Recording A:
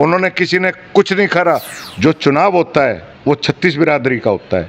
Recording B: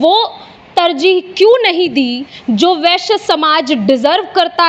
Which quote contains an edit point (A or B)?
A